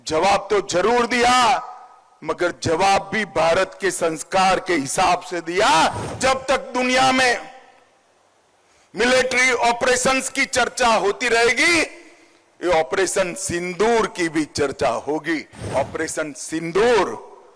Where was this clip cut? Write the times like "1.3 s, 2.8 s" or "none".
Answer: 6.1 s, 15.7 s

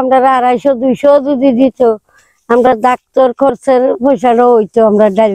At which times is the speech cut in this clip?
none

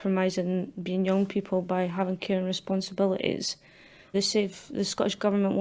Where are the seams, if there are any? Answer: 4.1 s

